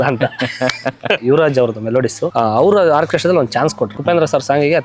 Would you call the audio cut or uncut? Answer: cut